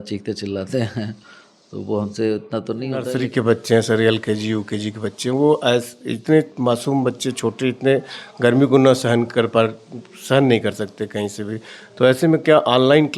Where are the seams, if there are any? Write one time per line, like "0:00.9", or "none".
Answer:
0:03.1